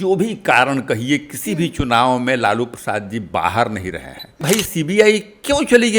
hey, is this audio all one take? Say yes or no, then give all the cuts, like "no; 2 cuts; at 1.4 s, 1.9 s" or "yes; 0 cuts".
no; 1 cut; at 4.4 s